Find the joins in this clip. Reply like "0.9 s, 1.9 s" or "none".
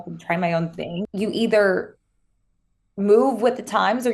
1.1 s

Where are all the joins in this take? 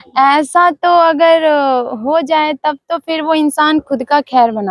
none

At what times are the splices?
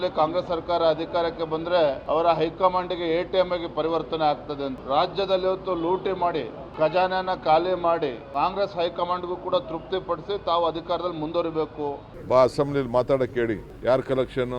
4.8 s, 8.2 s, 12.1 s, 13.7 s

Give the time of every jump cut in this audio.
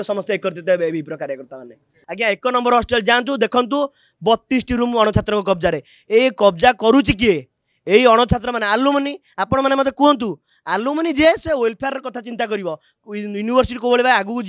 2.0 s

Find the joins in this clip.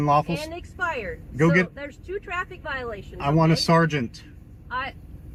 none

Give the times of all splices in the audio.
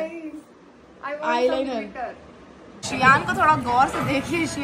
2.8 s

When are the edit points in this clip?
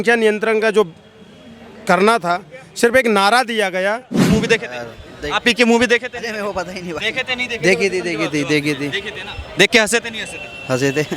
4.3 s

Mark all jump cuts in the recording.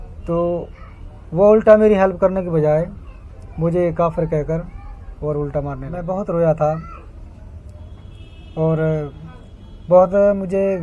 6.0 s

